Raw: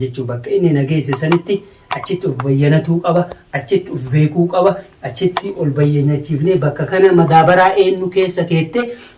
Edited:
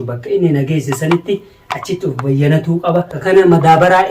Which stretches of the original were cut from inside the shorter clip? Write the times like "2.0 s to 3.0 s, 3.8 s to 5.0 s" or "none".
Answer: 3.4 s to 6.8 s